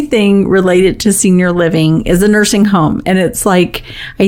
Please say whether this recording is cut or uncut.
uncut